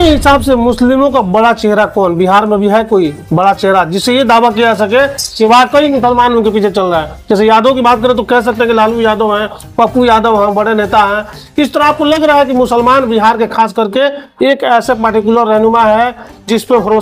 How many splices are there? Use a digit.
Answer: 0